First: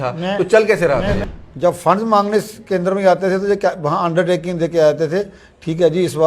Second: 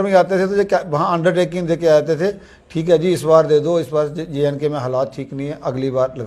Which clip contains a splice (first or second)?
first